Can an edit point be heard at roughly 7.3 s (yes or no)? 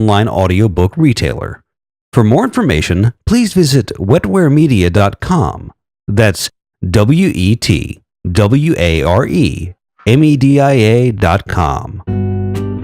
no